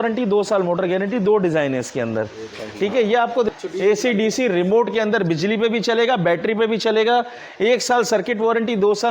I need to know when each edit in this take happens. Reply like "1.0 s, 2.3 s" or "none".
3.5 s